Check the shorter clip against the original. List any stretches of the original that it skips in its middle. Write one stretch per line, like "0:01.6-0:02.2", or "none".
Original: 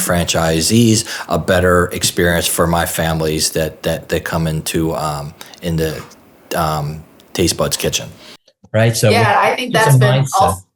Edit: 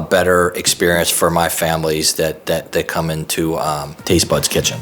0:05.3-0:07.2